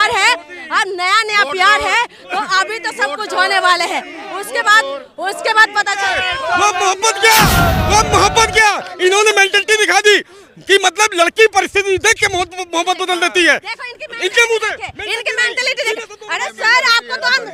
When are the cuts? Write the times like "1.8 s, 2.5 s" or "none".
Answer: 6.1 s